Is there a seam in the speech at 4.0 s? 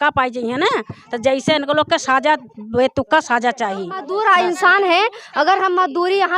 yes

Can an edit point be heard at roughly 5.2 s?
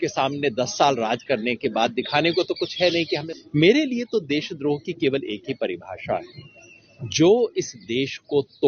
no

